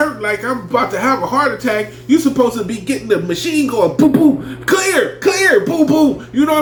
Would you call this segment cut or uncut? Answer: uncut